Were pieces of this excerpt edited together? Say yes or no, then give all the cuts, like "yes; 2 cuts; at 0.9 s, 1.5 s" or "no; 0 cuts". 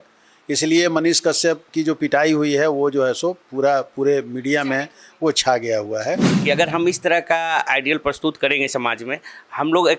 yes; 1 cut; at 6.3 s